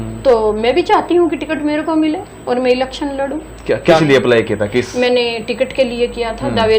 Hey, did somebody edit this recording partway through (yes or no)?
yes